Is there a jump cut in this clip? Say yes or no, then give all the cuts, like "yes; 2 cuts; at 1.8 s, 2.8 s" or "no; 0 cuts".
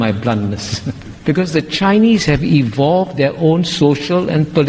yes; 1 cut; at 1.0 s